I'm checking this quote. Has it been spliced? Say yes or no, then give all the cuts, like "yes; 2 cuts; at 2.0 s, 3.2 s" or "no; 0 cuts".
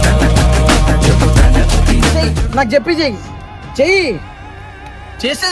yes; 1 cut; at 2.1 s